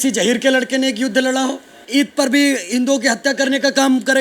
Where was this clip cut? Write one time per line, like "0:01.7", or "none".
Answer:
0:01.8